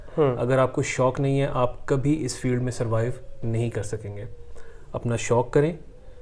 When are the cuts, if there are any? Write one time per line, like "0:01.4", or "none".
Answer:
none